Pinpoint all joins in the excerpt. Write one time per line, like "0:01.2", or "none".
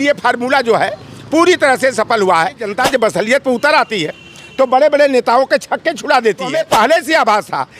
0:02.6
0:06.6